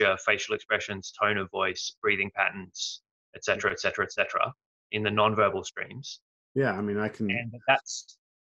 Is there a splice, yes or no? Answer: no